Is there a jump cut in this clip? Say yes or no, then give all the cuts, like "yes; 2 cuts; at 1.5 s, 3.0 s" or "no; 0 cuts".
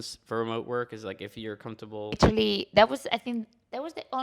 yes; 1 cut; at 2.2 s